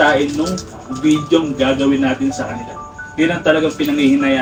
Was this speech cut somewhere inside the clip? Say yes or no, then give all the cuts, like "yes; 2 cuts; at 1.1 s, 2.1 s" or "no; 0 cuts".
no; 0 cuts